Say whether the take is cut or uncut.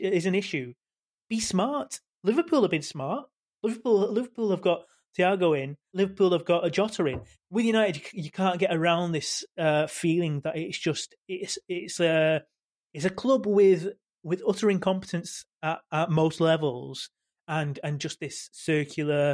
cut